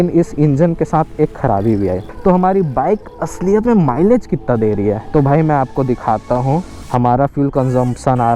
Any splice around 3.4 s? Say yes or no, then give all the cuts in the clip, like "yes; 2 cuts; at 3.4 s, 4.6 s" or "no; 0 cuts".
no; 3 cuts; at 2.1 s, 5.0 s, 6.8 s